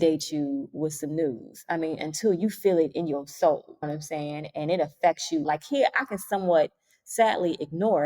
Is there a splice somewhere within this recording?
yes; 1 cut; at 5.4 s

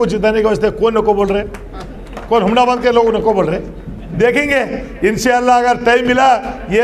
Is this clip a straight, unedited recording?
no; 1 cut; at 4.1 s

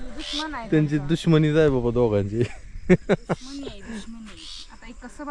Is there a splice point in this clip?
no; 0 cuts

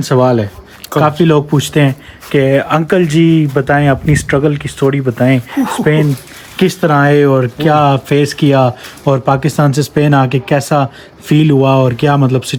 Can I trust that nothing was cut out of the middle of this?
yes; 0 cuts

